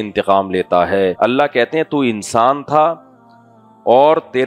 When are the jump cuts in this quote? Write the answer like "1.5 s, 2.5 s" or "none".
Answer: 1.1 s